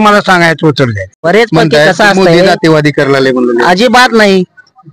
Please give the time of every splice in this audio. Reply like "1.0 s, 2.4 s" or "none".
1.2 s